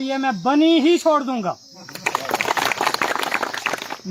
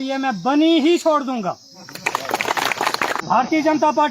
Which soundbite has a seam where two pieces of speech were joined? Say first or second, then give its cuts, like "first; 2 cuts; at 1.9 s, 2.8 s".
second; 1 cut; at 3.2 s